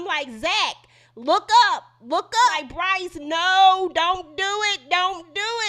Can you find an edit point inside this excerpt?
yes; 1 cut; at 2.5 s

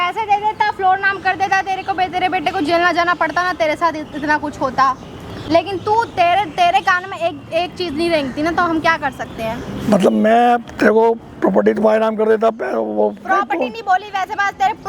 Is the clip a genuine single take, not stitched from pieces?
yes; 0 cuts

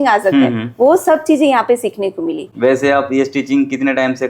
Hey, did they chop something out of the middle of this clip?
no; 0 cuts

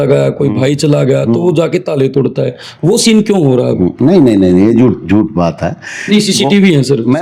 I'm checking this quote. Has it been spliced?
no; 0 cuts

